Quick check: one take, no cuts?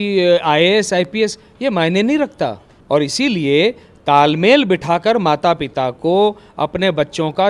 no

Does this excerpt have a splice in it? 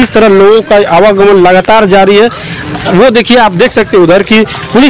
no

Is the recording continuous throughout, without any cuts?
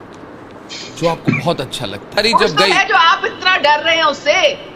no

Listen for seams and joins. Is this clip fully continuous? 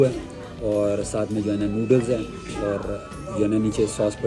yes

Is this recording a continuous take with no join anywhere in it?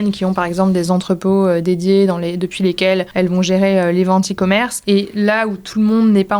no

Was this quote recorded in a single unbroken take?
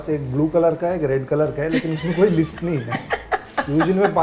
yes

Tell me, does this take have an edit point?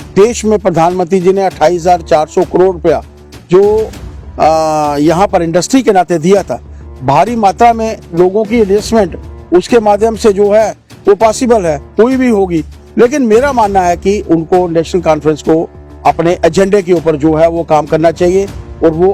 no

